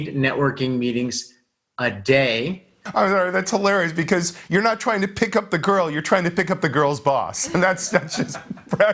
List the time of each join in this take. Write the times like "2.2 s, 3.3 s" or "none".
2.8 s